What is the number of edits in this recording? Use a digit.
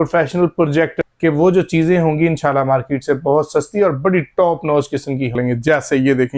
2